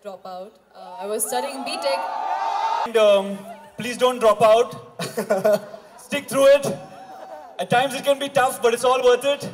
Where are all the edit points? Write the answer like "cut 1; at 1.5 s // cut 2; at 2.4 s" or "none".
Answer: cut 1; at 2.9 s